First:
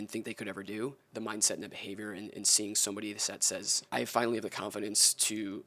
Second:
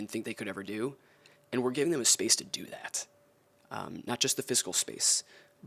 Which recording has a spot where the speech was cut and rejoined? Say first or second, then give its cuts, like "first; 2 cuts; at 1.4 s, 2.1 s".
first; 2 cuts; at 1.0 s, 3.8 s